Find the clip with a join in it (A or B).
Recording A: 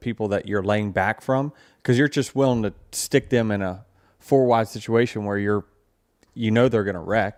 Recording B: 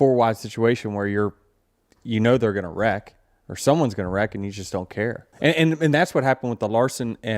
B